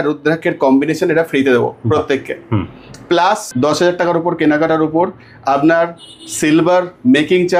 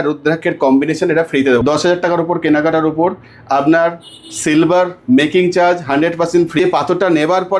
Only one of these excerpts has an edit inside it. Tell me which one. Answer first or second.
second